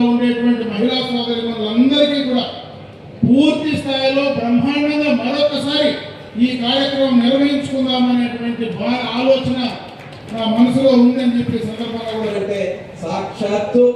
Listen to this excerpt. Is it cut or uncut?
cut